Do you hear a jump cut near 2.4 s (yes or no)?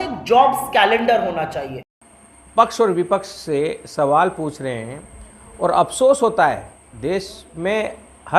yes